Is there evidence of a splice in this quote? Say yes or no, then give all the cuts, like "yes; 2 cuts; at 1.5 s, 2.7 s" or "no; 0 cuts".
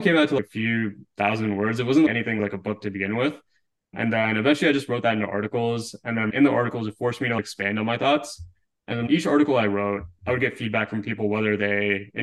yes; 1 cut; at 2.4 s